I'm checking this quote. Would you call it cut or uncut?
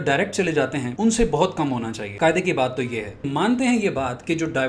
cut